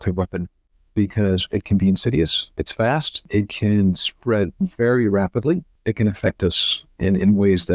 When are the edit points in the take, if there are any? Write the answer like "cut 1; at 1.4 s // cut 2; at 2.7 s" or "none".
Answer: cut 1; at 3.3 s // cut 2; at 5.7 s